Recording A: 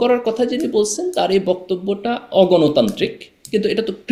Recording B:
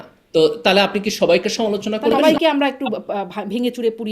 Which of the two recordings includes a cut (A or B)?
B